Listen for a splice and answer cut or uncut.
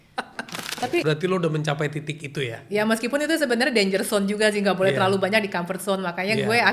cut